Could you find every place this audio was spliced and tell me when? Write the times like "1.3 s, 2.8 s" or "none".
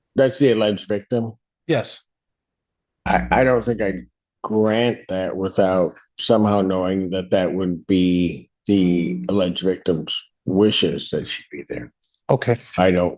none